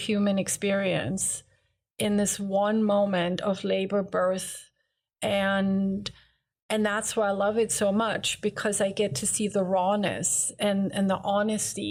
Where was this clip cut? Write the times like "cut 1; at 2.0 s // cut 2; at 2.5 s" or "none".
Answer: none